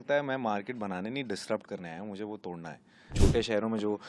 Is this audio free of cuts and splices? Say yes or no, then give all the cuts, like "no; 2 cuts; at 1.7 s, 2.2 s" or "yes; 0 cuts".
no; 1 cut; at 3.1 s